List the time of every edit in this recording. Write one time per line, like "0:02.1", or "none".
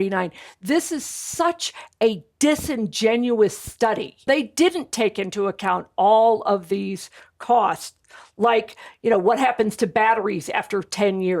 0:04.2